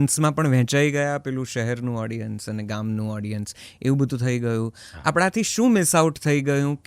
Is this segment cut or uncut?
uncut